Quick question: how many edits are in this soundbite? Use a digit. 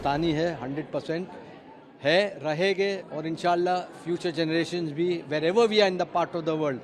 0